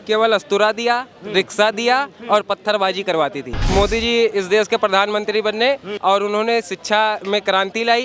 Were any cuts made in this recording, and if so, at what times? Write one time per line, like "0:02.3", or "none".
0:03.6
0:05.9